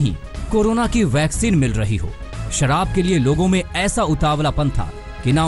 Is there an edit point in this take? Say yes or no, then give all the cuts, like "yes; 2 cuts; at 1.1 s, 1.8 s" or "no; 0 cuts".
no; 0 cuts